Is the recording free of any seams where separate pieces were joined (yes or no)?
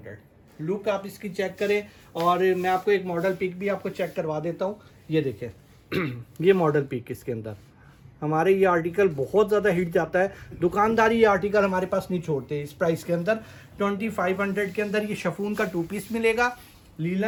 yes